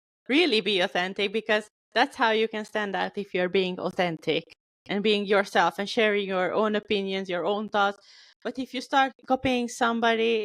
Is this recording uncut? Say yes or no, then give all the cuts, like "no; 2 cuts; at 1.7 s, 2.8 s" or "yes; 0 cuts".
yes; 0 cuts